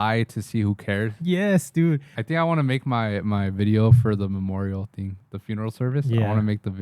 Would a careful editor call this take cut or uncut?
cut